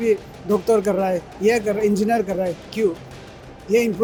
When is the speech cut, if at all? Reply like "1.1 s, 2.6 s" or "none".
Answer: none